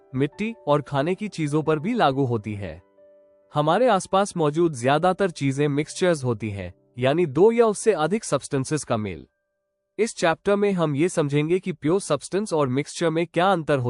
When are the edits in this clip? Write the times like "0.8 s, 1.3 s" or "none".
none

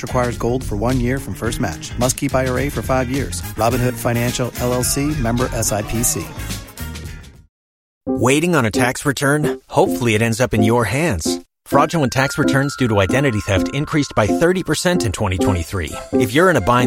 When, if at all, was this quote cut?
8.0 s

